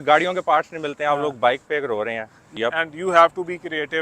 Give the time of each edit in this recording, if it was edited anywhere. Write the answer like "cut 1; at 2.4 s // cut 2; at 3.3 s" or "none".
cut 1; at 2.4 s